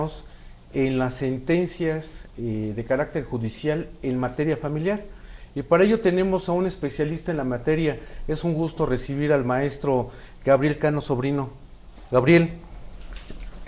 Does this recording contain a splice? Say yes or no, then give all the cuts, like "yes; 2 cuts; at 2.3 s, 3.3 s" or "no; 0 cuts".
yes; 1 cut; at 5.2 s